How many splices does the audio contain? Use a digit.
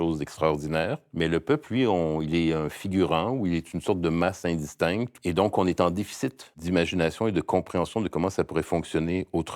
3